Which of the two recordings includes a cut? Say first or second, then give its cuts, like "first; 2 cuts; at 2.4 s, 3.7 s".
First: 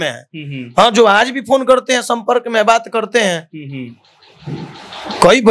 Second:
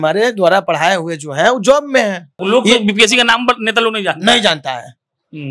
second; 1 cut; at 2.3 s